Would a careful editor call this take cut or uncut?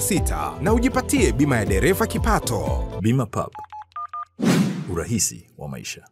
cut